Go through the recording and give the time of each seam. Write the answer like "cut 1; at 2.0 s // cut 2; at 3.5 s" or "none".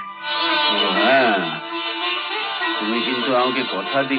none